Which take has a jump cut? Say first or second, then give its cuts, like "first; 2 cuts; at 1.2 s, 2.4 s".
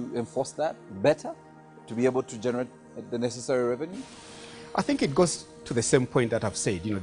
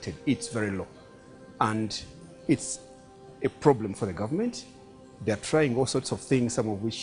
first; 1 cut; at 5.9 s